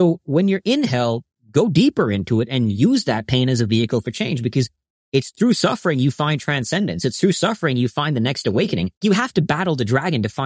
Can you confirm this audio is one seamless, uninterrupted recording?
no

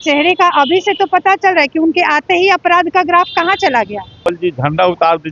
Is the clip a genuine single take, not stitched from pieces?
no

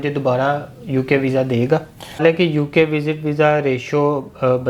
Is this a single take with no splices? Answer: no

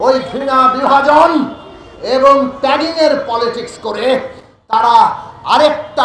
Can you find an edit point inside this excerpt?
no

